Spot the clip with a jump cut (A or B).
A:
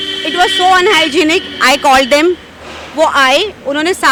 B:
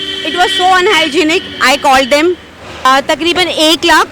B